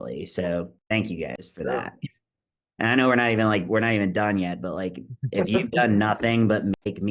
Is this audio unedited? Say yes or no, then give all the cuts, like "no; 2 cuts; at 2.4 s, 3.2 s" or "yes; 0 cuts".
yes; 0 cuts